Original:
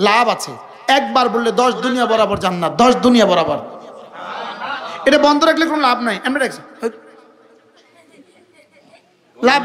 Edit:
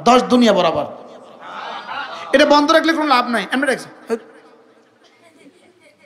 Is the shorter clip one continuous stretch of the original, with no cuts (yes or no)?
yes